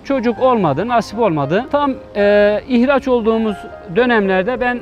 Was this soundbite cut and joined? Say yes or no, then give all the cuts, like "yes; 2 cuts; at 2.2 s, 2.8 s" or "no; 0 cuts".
yes; 1 cut; at 1.7 s